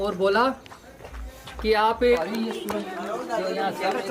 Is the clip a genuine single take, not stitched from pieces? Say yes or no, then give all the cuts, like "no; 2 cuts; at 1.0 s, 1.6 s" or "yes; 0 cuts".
no; 1 cut; at 2.2 s